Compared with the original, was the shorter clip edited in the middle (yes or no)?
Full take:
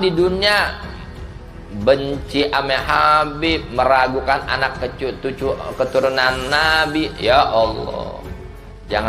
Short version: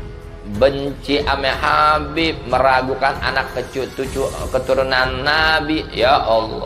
no